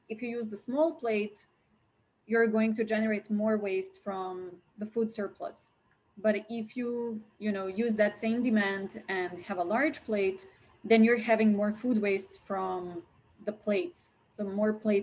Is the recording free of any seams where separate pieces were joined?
yes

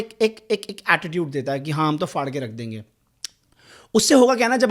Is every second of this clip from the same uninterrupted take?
yes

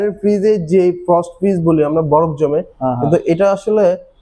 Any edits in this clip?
no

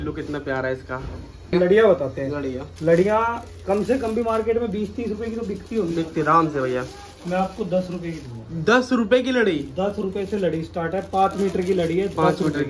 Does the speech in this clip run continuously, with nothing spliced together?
no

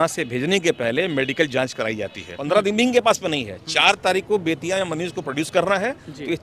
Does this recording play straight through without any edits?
no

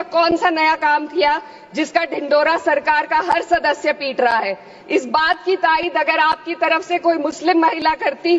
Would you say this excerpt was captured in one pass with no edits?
yes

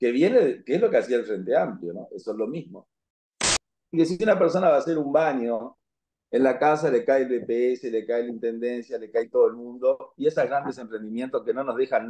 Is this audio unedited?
no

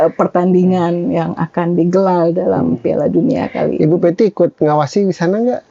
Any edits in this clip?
no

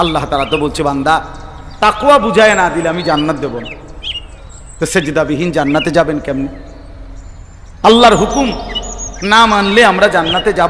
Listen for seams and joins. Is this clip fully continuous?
yes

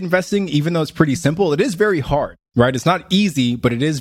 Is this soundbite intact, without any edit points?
no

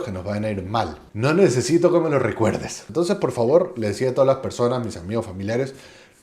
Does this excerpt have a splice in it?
yes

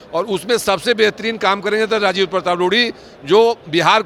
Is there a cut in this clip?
no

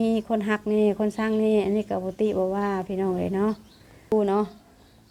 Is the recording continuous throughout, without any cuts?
no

